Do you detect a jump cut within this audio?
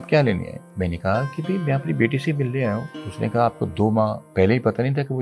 no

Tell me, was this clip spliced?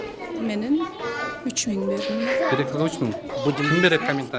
yes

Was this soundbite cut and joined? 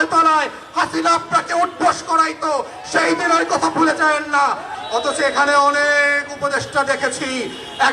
yes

